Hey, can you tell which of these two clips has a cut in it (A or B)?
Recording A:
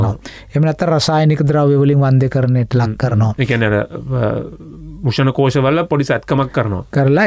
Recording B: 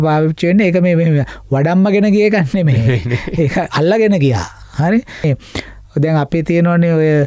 B